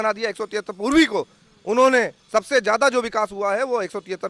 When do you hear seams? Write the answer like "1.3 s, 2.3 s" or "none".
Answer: none